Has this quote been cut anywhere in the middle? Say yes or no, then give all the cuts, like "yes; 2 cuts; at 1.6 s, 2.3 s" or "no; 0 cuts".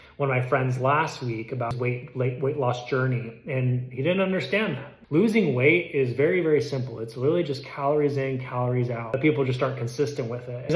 no; 0 cuts